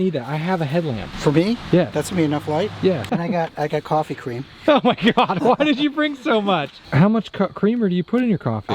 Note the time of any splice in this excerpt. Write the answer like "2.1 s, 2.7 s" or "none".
1.1 s, 1.9 s, 3.1 s, 6.8 s